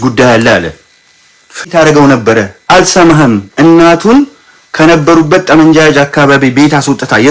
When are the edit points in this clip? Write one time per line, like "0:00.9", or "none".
0:01.6